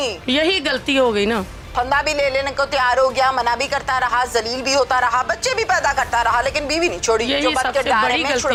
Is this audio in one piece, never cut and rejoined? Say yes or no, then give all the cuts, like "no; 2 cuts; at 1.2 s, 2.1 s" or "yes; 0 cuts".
yes; 0 cuts